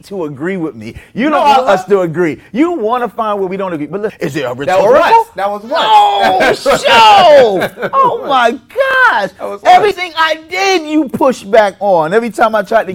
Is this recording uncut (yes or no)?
no